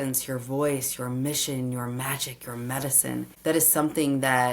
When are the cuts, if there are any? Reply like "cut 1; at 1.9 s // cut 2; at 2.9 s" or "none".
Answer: cut 1; at 3.3 s